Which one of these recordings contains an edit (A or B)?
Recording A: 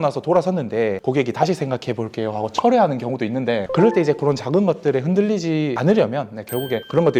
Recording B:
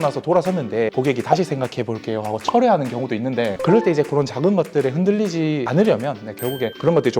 B